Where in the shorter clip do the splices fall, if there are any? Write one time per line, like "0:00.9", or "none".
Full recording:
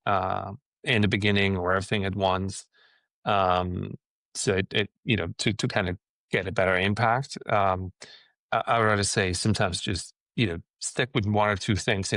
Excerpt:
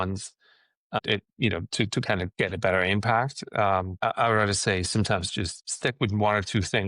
0:01.0
0:02.3
0:03.9
0:05.6